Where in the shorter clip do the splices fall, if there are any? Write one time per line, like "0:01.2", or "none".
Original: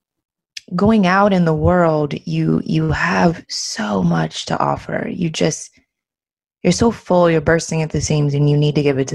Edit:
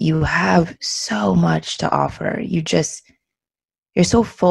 none

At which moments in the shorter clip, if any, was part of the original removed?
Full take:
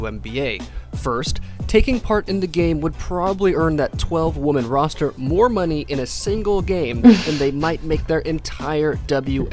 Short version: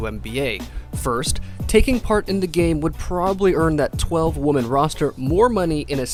none

